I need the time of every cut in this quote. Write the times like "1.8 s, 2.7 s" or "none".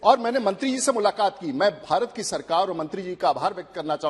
none